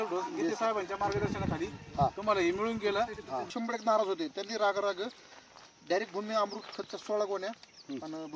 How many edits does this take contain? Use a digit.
1